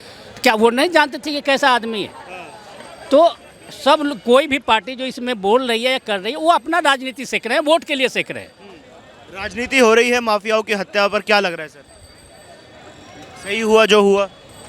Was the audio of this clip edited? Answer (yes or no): no